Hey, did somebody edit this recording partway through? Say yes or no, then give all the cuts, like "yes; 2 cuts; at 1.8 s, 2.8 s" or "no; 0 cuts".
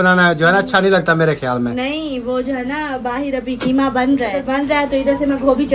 yes; 1 cut; at 4.5 s